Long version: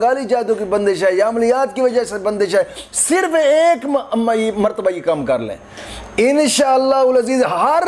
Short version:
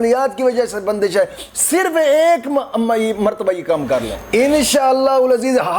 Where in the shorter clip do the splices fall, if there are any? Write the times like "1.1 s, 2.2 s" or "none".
4.2 s